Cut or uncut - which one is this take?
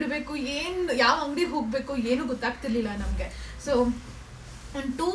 uncut